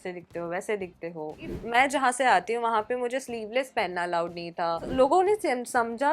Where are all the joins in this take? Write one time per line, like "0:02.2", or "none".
0:01.6
0:04.9

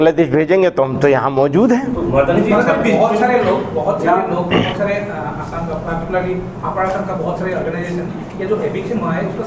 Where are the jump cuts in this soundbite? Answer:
none

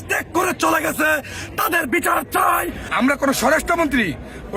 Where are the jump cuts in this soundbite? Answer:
0:02.8

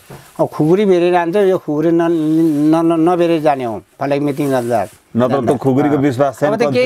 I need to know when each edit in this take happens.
none

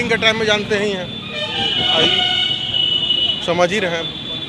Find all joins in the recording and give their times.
none

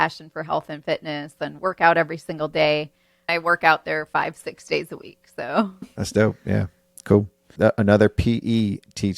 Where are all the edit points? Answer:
0:03.3
0:05.8
0:07.4

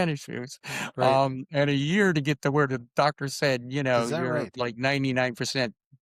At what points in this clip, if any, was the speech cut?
none

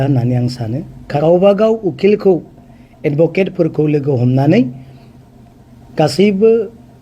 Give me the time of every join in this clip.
0:01.2

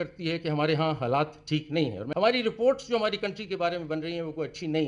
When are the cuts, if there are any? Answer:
0:02.2

